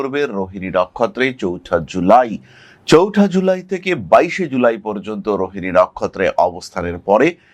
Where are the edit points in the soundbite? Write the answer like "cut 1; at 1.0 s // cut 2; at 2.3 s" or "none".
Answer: none